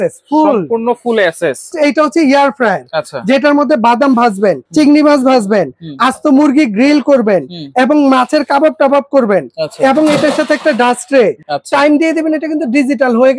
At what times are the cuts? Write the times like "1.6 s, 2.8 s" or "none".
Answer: 1.7 s, 4.6 s, 11.4 s